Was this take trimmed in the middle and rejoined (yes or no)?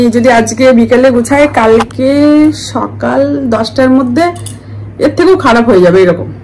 no